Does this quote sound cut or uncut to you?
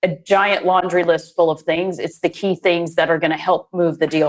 cut